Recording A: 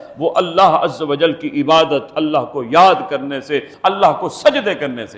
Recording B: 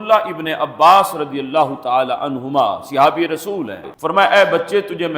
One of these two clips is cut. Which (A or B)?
B